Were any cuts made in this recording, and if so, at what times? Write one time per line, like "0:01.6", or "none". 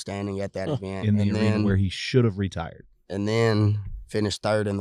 none